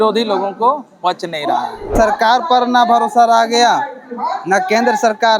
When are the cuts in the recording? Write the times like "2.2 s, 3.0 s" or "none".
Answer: 1.9 s

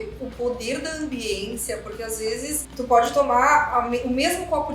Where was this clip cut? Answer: 2.7 s

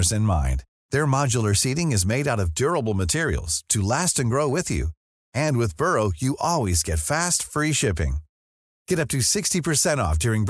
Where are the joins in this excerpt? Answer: none

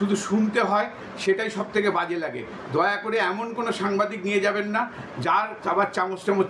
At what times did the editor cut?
none

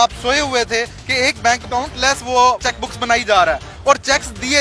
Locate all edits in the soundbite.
none

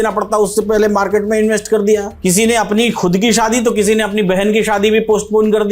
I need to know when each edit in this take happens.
2.1 s

